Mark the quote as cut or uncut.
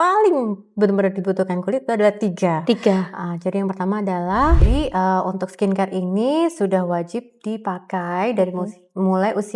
cut